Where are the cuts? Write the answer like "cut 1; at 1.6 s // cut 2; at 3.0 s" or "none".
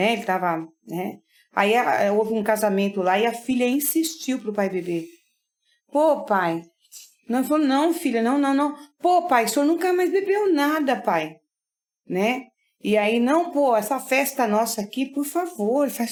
none

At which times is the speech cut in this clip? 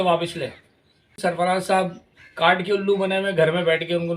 cut 1; at 1.1 s

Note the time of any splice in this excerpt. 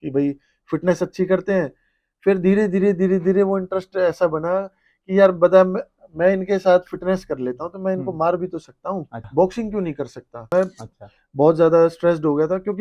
cut 1; at 9.3 s // cut 2; at 10.5 s

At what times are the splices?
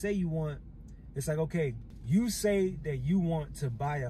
cut 1; at 1.9 s

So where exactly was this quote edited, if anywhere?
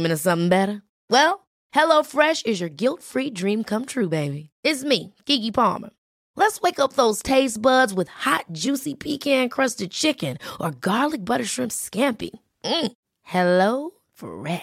none

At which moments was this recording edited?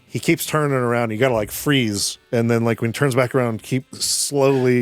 cut 1; at 2.1 s // cut 2; at 3.9 s

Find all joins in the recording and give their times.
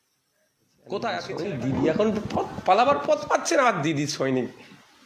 cut 1; at 1.3 s

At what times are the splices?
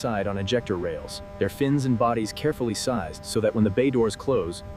none

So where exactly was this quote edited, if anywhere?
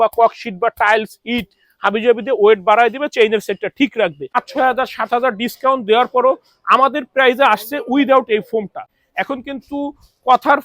cut 1; at 4.3 s // cut 2; at 9.0 s

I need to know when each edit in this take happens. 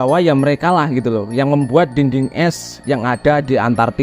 none

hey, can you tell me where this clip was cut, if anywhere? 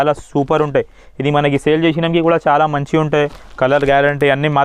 none

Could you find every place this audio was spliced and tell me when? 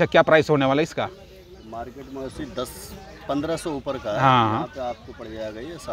none

